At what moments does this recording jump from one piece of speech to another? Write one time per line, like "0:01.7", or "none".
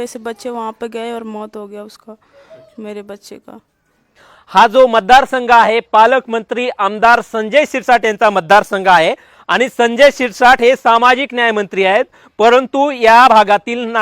0:04.3